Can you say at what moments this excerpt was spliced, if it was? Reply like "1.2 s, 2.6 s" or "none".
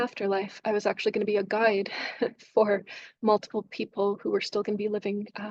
none